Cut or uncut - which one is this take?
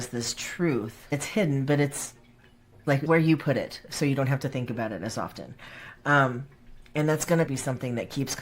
cut